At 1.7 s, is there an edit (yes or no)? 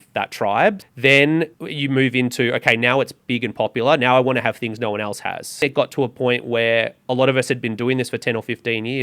yes